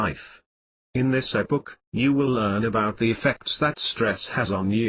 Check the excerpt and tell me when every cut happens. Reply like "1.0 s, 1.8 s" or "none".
2.3 s